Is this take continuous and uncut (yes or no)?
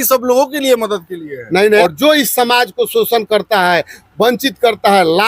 no